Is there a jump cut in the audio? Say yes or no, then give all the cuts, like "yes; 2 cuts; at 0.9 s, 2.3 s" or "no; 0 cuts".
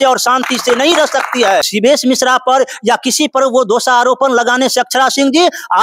yes; 1 cut; at 1.7 s